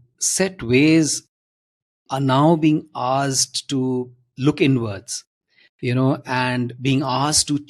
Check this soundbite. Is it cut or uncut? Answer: uncut